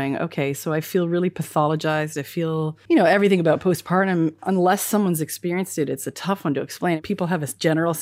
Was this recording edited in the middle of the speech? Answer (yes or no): yes